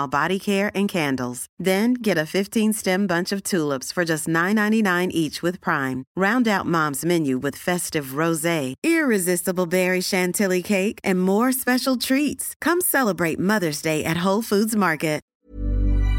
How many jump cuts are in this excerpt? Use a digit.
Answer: 1